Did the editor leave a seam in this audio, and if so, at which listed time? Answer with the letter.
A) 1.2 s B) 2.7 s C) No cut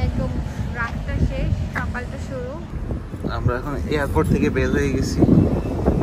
B